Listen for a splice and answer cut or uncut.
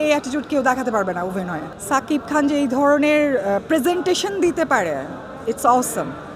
cut